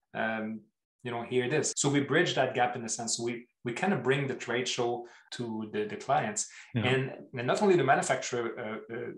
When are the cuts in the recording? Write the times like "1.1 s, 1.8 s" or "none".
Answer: 1.7 s, 5.2 s